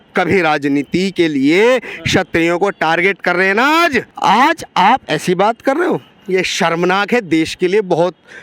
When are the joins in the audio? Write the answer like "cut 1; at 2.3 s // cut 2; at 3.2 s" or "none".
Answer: cut 1; at 4.1 s